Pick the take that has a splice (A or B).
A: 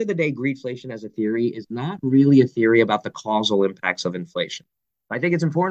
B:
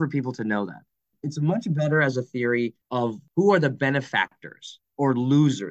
B